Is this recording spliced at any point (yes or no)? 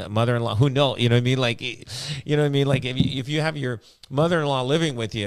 no